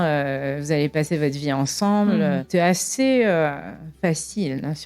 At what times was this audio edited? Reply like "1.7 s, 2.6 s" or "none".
2.4 s